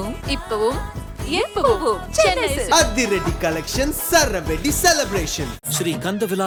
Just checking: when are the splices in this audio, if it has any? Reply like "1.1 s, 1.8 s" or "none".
none